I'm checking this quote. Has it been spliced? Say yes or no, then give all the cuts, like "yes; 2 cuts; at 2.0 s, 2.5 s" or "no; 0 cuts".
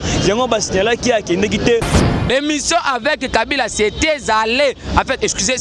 yes; 1 cut; at 1.9 s